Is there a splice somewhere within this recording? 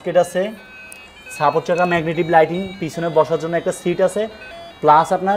no; 0 cuts

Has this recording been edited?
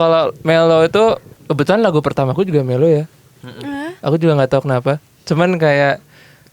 yes; 1 cut; at 1.3 s

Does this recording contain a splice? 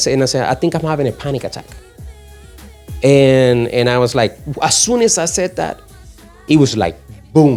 no; 0 cuts

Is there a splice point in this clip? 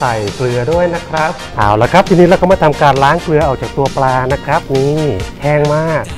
yes; 2 cuts; at 1.4 s, 5.3 s

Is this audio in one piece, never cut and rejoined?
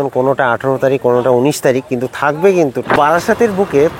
no; 1 cut; at 2.9 s

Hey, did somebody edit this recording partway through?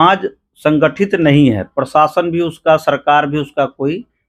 no; 0 cuts

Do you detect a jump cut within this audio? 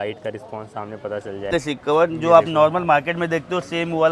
yes; 1 cut; at 1.5 s

